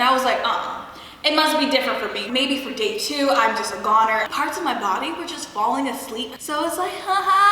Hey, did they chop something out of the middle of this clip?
yes; 2 cuts; at 4.3 s, 6.3 s

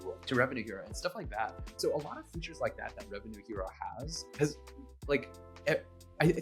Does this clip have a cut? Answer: yes; 1 cut; at 1.7 s

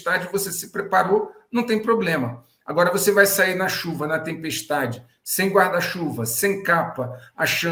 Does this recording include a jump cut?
no; 0 cuts

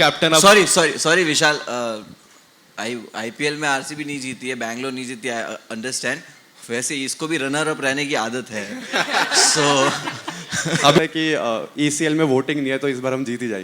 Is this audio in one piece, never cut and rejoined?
no; 1 cut; at 11.0 s

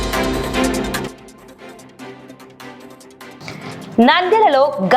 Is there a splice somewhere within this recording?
no; 0 cuts

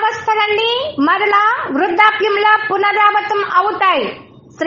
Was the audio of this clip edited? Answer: no; 0 cuts

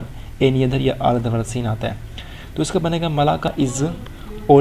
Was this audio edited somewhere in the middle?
yes; 1 cut; at 3.5 s

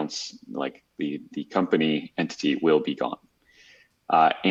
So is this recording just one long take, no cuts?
yes; 0 cuts

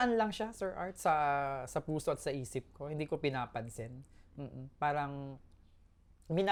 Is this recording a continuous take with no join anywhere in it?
yes; 0 cuts

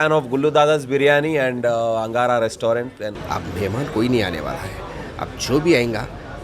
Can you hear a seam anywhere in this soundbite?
yes; 1 cut; at 3.1 s

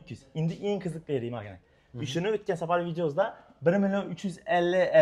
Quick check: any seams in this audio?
no; 0 cuts

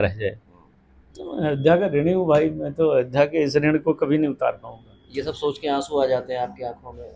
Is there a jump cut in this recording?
no; 0 cuts

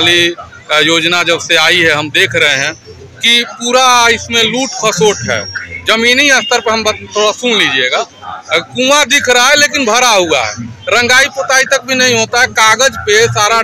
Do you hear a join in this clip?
no; 0 cuts

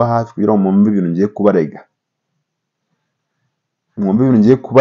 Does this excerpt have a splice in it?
no; 0 cuts

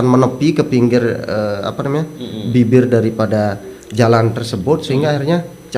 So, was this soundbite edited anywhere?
no; 0 cuts

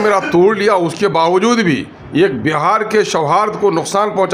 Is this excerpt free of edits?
no; 1 cut; at 2.0 s

